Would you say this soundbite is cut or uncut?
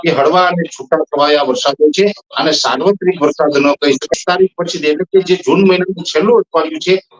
cut